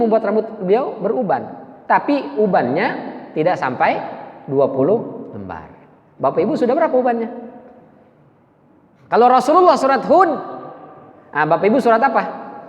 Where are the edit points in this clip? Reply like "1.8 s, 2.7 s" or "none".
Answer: 8.9 s